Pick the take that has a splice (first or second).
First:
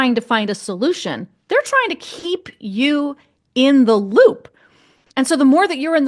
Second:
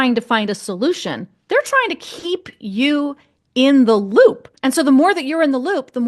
second